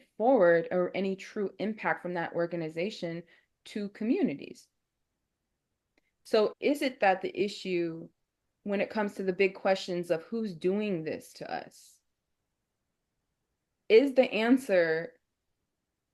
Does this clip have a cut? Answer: no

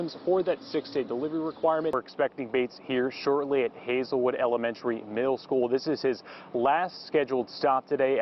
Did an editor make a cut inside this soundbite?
yes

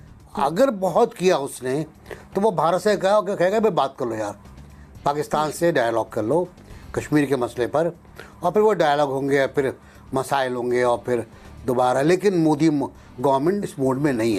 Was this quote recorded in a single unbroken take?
yes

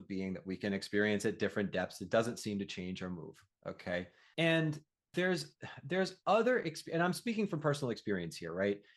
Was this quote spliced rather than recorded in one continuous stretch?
yes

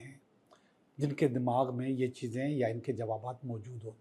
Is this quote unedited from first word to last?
yes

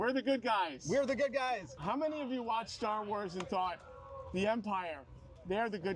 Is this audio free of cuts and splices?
no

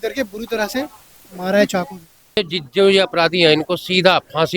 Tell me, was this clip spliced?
yes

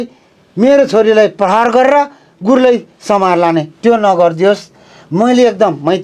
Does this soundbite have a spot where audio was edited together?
no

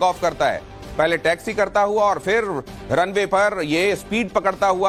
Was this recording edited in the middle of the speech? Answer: no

